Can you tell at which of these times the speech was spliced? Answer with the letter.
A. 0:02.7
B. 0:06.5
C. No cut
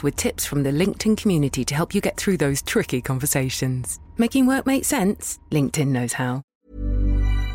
B